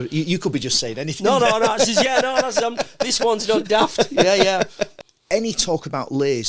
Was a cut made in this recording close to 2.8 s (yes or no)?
no